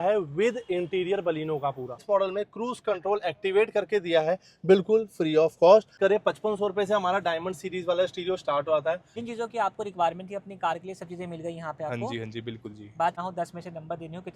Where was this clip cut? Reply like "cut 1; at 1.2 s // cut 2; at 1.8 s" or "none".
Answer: cut 1; at 2.0 s // cut 2; at 5.9 s // cut 3; at 9.1 s // cut 4; at 13.2 s